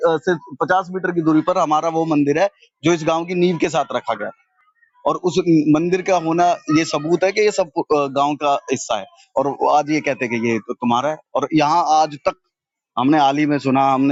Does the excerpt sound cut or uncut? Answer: uncut